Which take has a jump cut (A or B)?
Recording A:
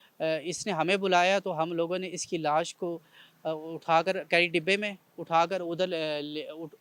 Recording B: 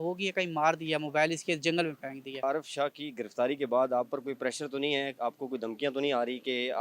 B